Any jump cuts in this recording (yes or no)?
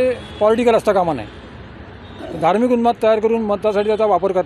no